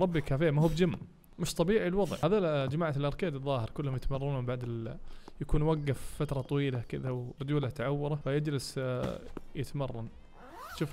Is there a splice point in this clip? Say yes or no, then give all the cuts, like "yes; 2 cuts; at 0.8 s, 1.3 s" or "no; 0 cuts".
yes; 3 cuts; at 2.1 s, 7.3 s, 8.2 s